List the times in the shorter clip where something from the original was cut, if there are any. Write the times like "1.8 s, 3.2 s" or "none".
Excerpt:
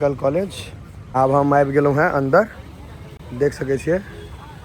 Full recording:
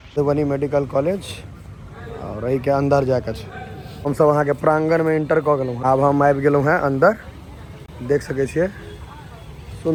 1.0 s